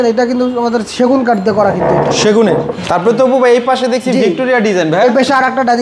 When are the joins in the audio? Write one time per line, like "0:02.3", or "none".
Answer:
0:02.7